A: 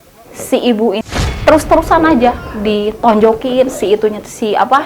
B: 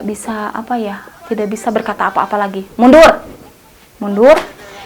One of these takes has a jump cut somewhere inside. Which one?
A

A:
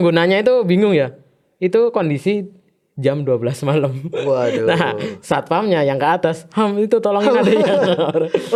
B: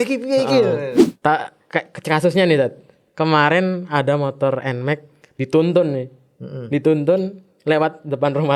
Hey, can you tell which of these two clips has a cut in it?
B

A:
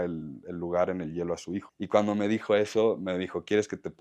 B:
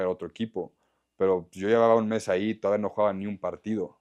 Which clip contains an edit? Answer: A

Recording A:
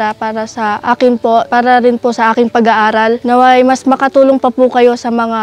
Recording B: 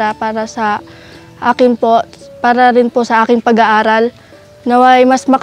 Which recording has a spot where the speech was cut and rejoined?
A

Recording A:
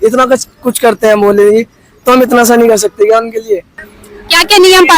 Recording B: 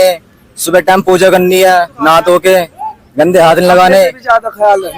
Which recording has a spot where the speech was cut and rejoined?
A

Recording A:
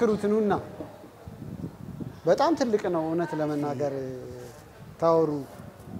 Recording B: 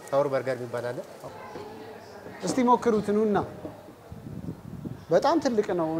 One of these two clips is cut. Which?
B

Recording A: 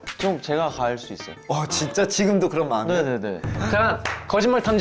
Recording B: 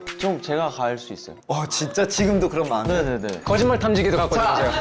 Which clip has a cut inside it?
B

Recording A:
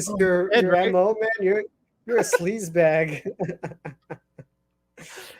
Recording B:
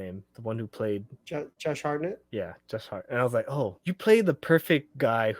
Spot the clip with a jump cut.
B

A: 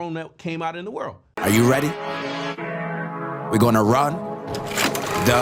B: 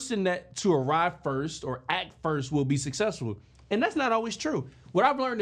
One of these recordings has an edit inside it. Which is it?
A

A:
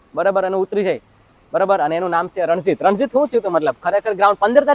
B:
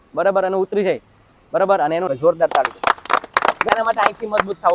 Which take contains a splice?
B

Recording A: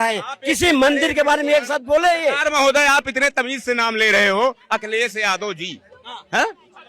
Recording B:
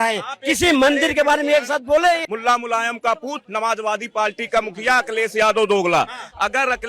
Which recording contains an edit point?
B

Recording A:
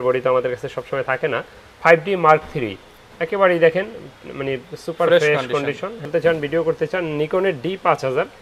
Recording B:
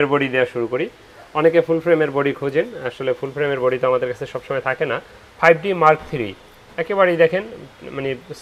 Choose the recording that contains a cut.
A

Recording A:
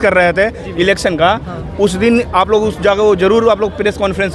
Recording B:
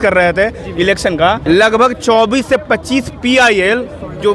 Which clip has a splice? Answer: B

